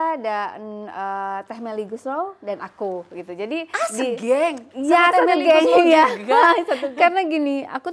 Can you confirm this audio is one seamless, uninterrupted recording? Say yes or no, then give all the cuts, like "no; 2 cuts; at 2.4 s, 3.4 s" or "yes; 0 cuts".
no; 1 cut; at 6.9 s